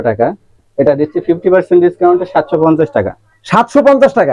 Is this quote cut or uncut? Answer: uncut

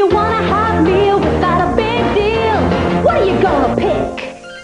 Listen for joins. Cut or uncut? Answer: uncut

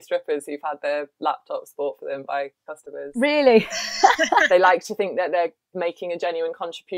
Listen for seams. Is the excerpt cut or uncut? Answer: cut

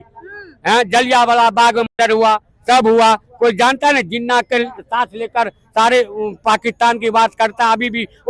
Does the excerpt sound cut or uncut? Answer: uncut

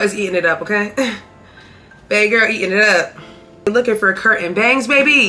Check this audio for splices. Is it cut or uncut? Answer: cut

